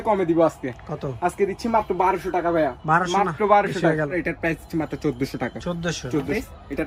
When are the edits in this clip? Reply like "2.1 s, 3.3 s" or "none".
none